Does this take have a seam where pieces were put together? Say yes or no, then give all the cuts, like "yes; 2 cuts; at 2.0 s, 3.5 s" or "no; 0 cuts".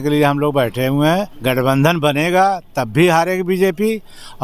yes; 1 cut; at 1.3 s